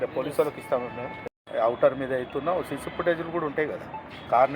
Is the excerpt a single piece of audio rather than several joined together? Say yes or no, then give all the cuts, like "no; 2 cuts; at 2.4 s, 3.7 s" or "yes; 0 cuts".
no; 1 cut; at 1.4 s